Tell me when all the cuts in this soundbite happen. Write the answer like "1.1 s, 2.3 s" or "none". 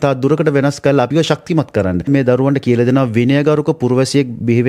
1.1 s, 2.1 s